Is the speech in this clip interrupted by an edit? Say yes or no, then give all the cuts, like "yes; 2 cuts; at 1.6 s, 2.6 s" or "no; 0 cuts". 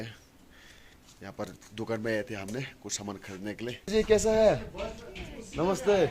yes; 1 cut; at 3.9 s